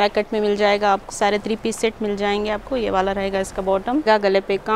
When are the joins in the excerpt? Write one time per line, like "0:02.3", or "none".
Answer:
0:01.1
0:04.0